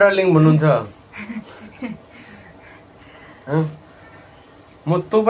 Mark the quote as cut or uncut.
uncut